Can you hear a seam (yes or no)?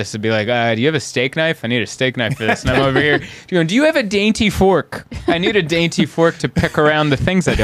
no